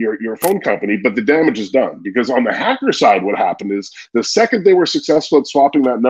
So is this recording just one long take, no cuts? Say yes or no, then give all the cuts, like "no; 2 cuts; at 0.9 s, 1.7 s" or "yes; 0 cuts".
yes; 0 cuts